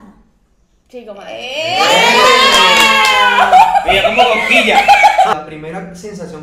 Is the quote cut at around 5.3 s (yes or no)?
yes